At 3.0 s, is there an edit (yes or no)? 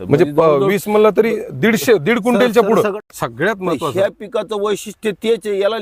yes